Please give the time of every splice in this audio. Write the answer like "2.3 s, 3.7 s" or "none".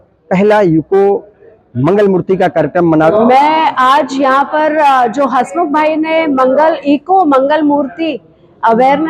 3.1 s